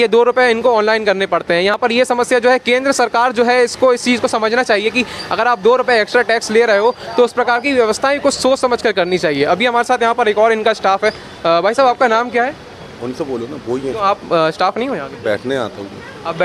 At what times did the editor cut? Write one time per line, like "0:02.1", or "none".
none